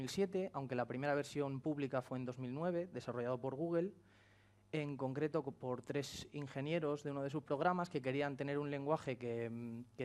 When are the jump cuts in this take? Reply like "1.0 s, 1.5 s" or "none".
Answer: 2.5 s